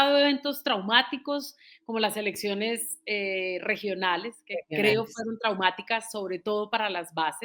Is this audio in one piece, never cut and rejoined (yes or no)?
yes